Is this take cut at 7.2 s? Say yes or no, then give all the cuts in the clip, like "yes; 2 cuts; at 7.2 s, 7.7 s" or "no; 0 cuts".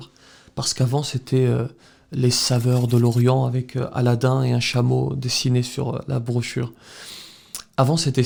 no; 0 cuts